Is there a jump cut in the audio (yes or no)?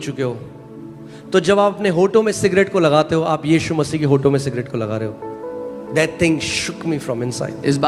no